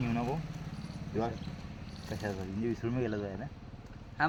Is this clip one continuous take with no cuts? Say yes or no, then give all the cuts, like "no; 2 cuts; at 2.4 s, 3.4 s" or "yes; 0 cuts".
yes; 0 cuts